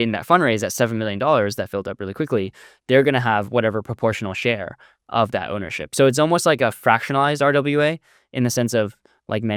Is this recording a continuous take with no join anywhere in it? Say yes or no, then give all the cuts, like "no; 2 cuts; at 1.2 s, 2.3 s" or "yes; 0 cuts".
yes; 0 cuts